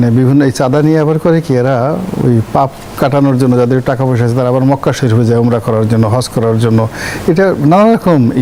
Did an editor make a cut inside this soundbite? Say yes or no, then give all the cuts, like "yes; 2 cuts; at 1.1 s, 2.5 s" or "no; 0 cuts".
no; 0 cuts